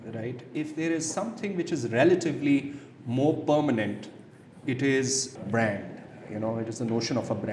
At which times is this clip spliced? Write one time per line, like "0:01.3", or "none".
0:05.3